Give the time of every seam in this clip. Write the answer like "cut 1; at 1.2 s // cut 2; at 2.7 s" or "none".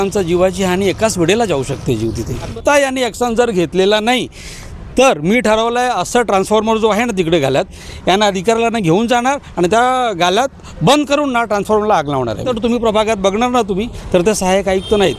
cut 1; at 2.5 s // cut 2; at 12.5 s